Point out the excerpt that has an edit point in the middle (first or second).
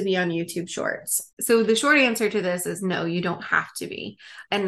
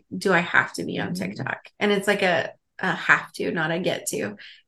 first